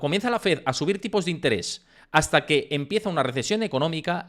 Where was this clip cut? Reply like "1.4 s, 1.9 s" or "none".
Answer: none